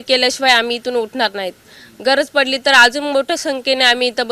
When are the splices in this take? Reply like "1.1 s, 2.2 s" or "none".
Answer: none